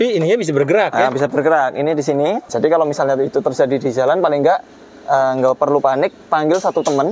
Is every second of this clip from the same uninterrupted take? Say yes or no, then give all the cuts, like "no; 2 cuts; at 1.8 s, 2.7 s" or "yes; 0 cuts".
no; 1 cut; at 2.5 s